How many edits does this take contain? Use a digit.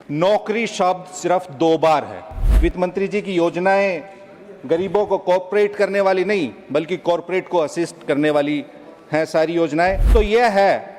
2